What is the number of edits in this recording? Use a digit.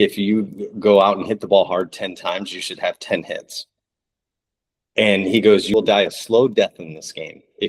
2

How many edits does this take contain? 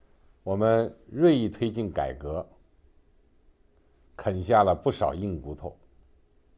0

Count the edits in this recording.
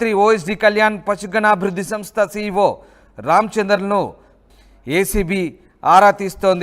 1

